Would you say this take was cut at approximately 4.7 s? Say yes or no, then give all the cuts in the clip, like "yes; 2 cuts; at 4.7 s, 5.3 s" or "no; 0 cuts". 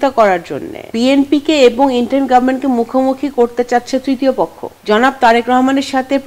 yes; 2 cuts; at 0.9 s, 4.7 s